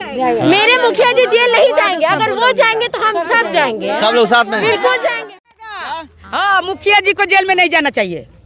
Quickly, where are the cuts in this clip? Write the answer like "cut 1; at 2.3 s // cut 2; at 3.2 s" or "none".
cut 1; at 5.2 s